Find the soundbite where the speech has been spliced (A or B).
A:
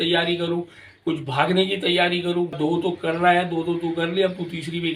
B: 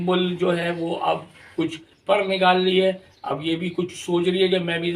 A